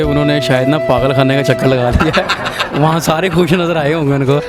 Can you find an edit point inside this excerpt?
no; 0 cuts

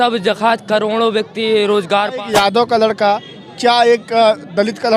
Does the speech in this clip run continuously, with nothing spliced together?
no; 1 cut; at 2.1 s

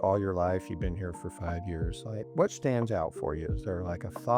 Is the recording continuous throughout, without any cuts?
no; 1 cut; at 2.3 s

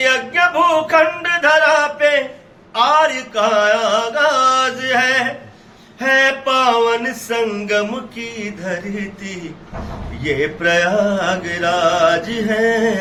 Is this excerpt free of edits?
yes; 0 cuts

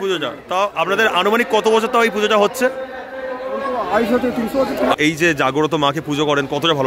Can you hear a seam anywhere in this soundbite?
yes; 1 cut; at 5.0 s

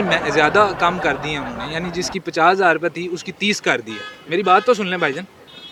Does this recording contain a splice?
no; 0 cuts

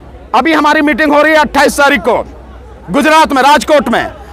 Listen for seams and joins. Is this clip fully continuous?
yes; 0 cuts

